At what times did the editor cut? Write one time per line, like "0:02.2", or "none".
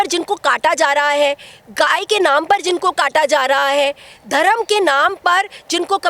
none